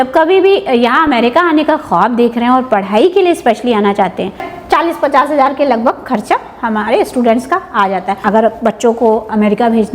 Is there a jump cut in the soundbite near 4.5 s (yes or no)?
yes